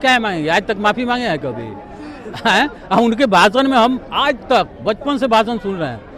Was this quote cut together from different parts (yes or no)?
no